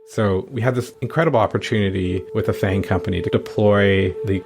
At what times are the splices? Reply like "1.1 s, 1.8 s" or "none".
1.0 s, 2.3 s